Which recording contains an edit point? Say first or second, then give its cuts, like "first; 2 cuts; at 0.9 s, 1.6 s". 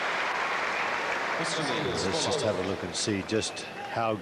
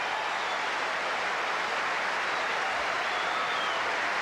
first; 1 cut; at 1.3 s